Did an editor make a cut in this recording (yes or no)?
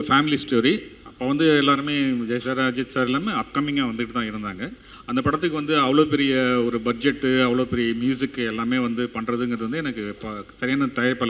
no